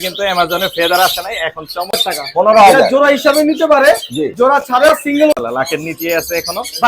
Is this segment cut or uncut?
cut